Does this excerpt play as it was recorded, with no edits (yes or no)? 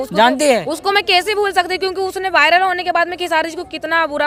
yes